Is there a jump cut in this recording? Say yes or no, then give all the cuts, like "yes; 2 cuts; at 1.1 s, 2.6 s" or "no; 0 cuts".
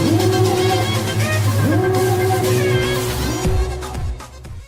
no; 0 cuts